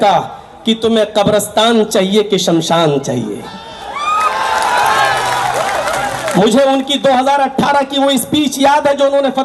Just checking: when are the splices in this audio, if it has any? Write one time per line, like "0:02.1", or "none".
none

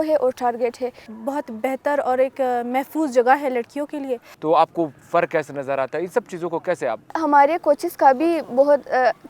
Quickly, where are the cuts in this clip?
0:01.1
0:04.3
0:07.1

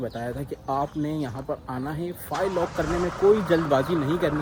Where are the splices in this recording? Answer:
none

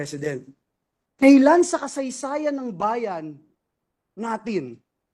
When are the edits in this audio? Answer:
none

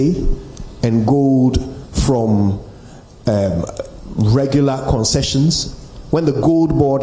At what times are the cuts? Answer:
none

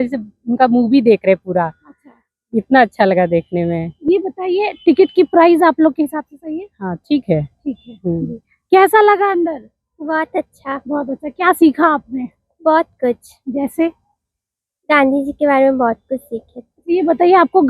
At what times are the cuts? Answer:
none

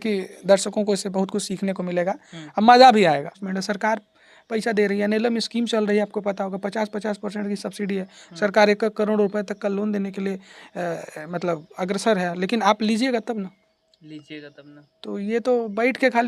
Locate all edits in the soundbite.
0:03.4

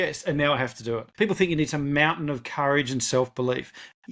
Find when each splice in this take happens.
0:01.1

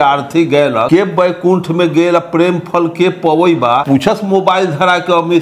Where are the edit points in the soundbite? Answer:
0:00.9
0:03.8

